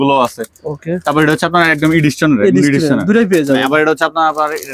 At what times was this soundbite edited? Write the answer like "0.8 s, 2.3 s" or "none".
none

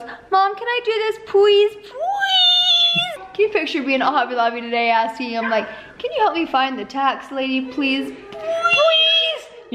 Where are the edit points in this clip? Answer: 3.2 s

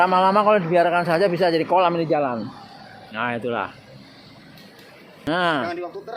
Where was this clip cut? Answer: 5.3 s

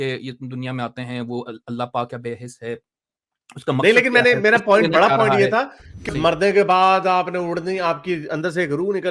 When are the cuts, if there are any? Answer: 6.1 s

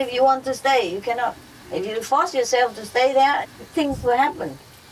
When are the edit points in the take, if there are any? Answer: none

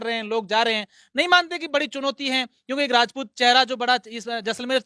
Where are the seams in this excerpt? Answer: none

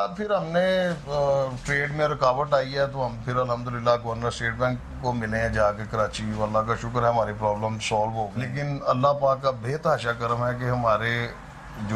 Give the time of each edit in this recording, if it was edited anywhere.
8.5 s

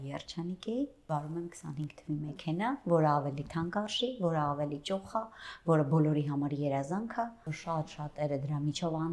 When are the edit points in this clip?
1.1 s, 7.6 s

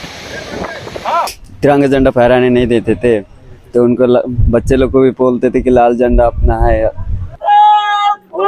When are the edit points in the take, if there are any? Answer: 1.4 s, 7.5 s

